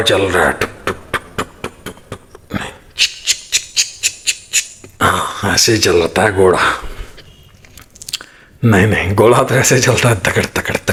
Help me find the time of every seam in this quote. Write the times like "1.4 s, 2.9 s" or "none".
none